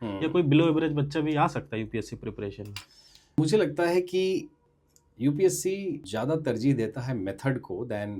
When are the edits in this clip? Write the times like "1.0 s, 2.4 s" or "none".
3.4 s, 4.6 s, 6.0 s